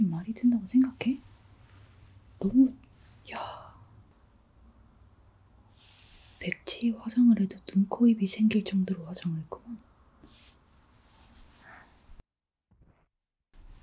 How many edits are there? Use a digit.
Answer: 0